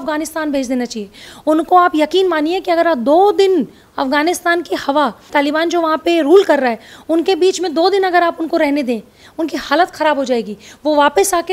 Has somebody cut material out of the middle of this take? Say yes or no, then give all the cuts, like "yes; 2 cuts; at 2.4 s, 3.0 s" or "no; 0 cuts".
yes; 1 cut; at 5.3 s